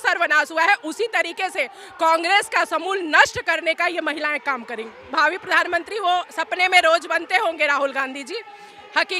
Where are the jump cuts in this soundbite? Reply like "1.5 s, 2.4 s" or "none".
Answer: 5.0 s